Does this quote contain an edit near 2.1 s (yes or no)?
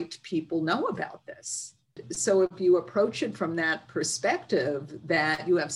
yes